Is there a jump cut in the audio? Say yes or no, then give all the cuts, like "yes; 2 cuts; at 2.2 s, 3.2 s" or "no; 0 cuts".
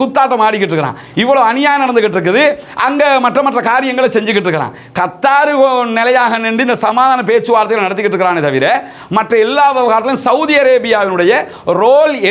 no; 0 cuts